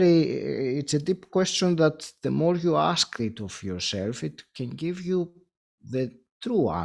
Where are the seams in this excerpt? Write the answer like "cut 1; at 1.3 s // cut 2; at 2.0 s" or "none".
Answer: none